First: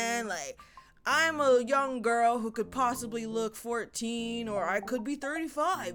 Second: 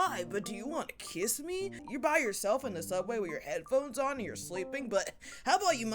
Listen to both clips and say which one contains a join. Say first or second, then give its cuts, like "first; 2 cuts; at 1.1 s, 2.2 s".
second; 1 cut; at 1.8 s